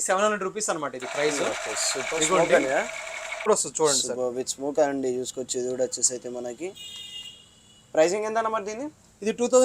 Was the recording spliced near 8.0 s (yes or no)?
no